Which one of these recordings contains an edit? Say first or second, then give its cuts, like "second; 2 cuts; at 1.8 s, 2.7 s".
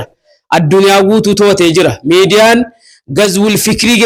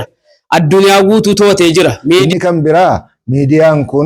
second; 1 cut; at 2.3 s